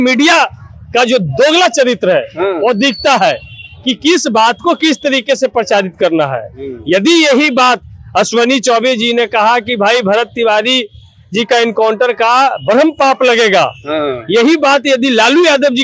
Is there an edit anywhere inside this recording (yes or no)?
no